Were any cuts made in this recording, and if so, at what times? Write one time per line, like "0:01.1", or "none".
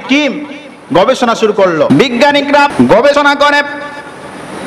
0:01.9
0:02.7